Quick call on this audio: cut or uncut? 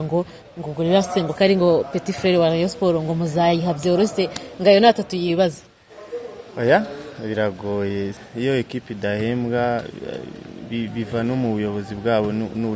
cut